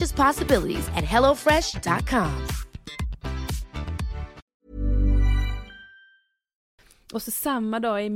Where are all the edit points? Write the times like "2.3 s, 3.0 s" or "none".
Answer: 4.4 s, 6.7 s